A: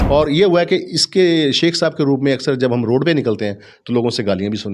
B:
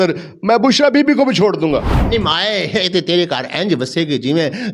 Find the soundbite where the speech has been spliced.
B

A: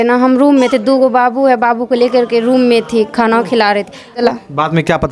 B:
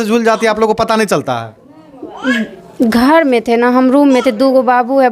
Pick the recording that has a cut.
A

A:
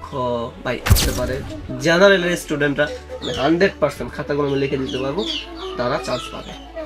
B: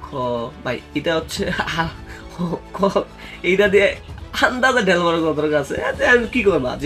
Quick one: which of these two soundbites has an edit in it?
A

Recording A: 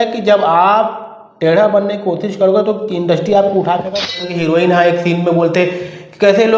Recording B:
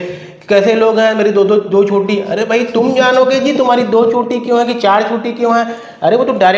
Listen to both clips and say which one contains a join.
A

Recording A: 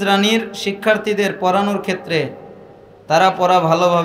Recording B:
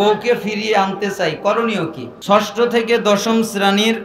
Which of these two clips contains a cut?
B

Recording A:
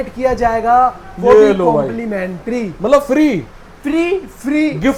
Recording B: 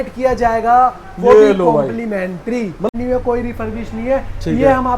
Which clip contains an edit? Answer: B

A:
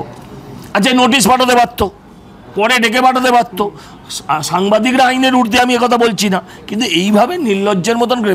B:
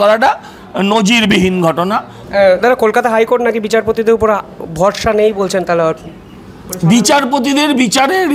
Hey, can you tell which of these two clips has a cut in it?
B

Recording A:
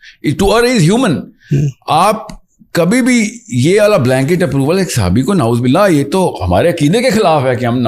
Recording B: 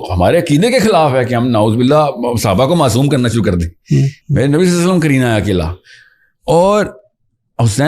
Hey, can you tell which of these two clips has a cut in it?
B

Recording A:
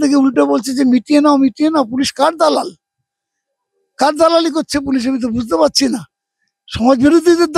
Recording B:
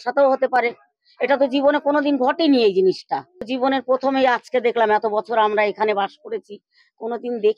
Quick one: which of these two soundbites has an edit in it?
B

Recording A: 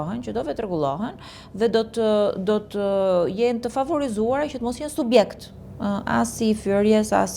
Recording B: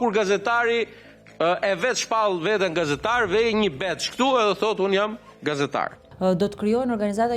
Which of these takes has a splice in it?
B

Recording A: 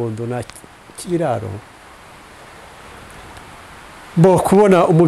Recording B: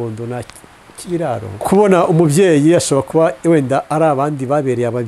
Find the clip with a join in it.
B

